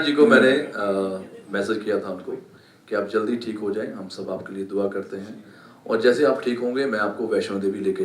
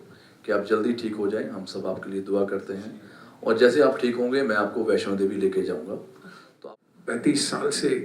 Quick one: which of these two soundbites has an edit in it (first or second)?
second